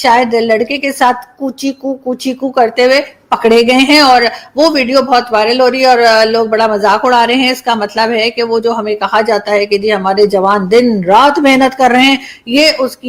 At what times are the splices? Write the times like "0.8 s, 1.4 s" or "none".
none